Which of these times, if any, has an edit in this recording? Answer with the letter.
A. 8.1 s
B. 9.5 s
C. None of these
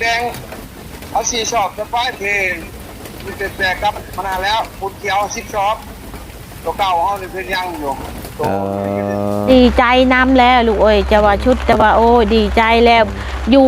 B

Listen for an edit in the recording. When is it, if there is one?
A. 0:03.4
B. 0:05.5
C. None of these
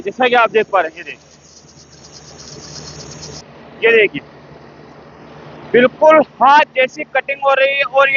A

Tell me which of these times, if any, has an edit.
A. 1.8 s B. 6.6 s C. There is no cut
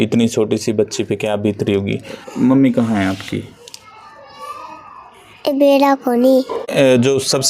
B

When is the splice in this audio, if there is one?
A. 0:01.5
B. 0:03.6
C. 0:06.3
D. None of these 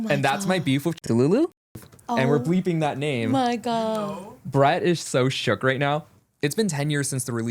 C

